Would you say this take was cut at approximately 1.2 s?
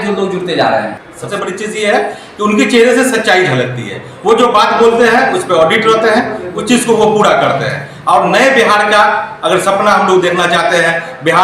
yes; 1 cut; at 1.2 s

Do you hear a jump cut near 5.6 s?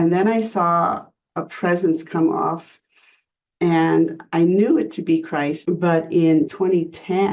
yes; 3 cuts; at 2.7 s, 5.6 s, 6.5 s

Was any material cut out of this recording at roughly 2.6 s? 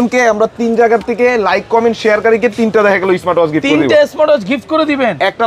no; 0 cuts

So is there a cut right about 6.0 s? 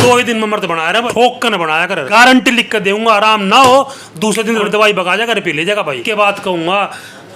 yes; 4 cuts; at 1.1 s, 2.0 s, 4.2 s, 6.0 s

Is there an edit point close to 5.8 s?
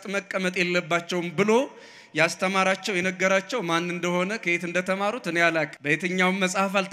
yes; 1 cut; at 5.8 s

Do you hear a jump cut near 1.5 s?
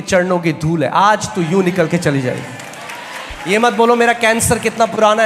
no; 1 cut; at 3.2 s

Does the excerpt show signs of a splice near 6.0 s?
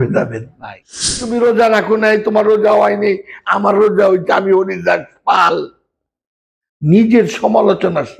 no; 1 cut; at 1.2 s

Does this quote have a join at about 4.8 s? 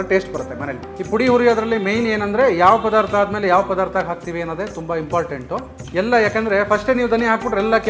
no; 1 cut; at 0.9 s

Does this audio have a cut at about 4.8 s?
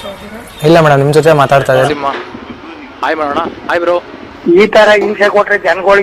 no; 1 cut; at 1.9 s

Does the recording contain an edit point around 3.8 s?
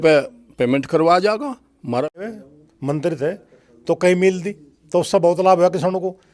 no; 1 cut; at 2.2 s

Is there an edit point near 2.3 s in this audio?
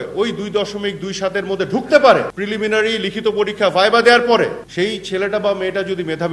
yes; 2 cuts; at 2.3 s, 4.6 s

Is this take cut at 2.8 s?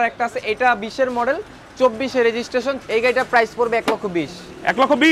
yes; 1 cut; at 2.8 s

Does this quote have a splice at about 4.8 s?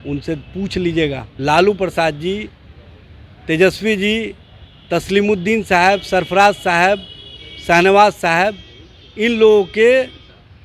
no; 1 cut; at 1.3 s

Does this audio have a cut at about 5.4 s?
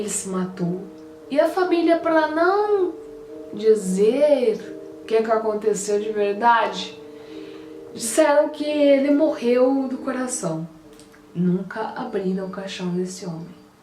yes; 1 cut; at 5.4 s

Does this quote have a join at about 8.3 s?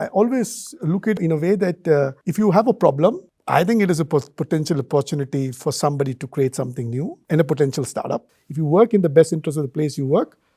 yes; 3 cuts; at 1.2 s, 7.2 s, 8.3 s

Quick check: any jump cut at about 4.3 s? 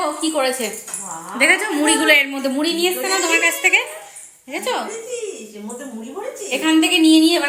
no; 0 cuts

